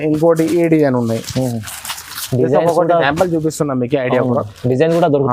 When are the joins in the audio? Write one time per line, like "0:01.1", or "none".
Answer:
none